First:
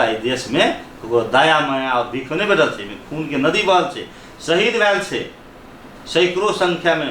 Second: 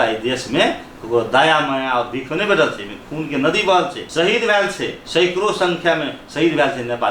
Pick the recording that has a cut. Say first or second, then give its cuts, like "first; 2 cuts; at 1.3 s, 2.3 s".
second; 2 cuts; at 4.0 s, 5.0 s